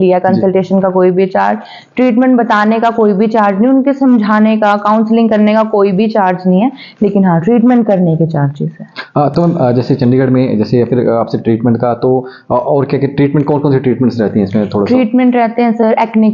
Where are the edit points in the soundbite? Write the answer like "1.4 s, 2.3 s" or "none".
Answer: none